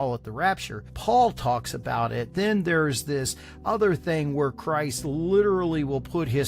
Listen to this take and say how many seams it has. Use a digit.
1